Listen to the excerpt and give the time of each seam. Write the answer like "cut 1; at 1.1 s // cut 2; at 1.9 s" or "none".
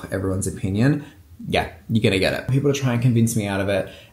cut 1; at 2.5 s